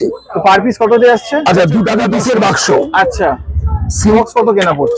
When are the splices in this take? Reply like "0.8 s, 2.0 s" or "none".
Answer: 2.0 s, 4.2 s